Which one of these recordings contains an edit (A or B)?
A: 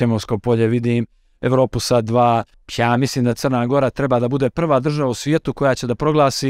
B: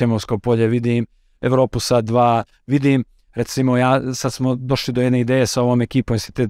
A